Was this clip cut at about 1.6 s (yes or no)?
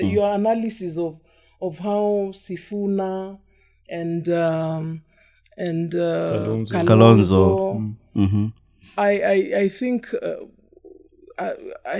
no